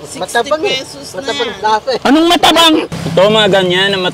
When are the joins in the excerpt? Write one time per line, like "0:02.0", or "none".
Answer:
0:03.0